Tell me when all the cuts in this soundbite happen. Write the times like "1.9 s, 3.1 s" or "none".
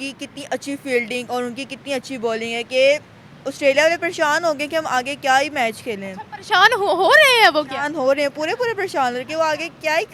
none